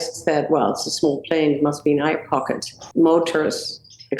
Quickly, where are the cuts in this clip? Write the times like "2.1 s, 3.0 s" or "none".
2.7 s